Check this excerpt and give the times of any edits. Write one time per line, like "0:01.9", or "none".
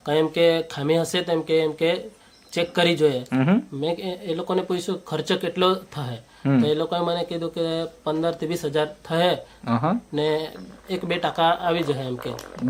none